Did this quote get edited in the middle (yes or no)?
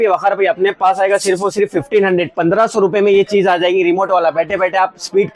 no